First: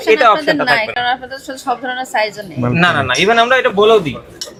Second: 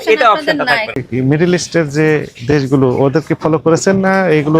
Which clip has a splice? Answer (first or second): second